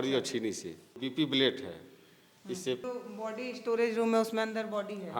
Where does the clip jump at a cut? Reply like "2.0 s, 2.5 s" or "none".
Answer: 1.0 s, 2.8 s